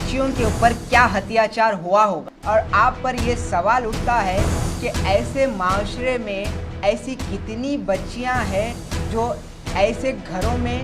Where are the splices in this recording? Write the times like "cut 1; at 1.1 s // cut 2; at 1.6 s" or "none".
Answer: cut 1; at 2.3 s